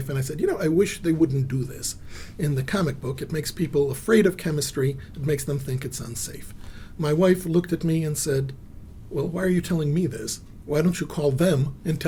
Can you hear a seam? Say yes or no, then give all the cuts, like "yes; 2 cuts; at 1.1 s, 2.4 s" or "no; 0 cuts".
no; 0 cuts